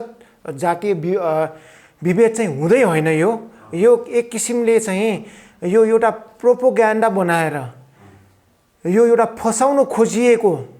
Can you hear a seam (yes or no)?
no